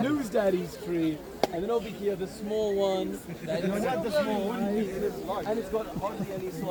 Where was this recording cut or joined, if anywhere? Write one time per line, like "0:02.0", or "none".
none

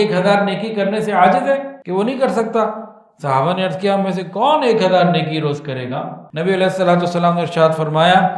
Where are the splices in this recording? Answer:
0:01.8
0:06.2

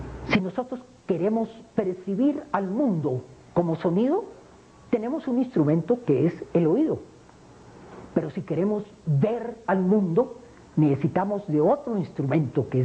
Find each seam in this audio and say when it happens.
0:02.3

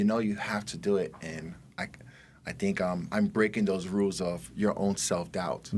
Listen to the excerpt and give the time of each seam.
none

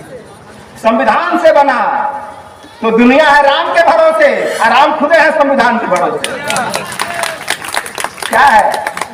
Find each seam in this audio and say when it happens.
none

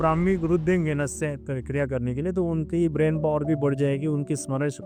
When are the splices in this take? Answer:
none

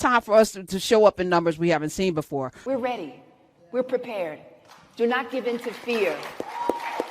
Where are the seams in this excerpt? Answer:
0:02.7

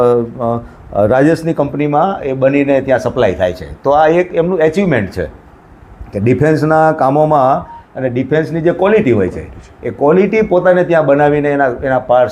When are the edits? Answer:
none

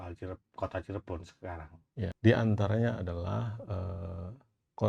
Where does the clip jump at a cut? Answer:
0:02.1

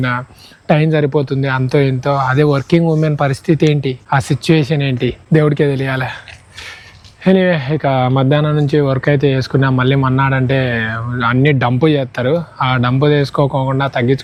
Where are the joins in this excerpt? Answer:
none

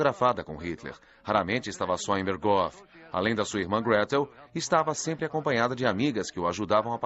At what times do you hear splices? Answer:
0:03.0

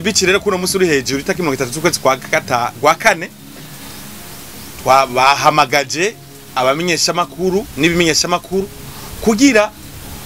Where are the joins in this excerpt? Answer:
none

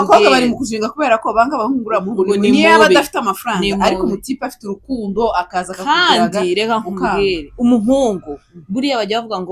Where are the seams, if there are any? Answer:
none

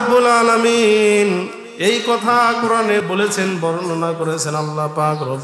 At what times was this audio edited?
0:03.0

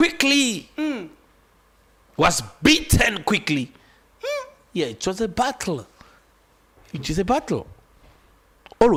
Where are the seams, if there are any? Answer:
none

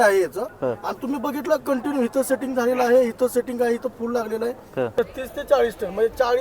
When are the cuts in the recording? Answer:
0:04.9

